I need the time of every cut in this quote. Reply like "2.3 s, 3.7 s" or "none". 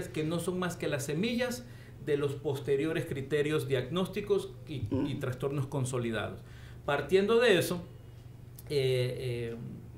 none